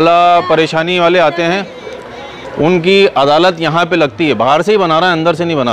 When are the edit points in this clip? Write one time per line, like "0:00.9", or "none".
none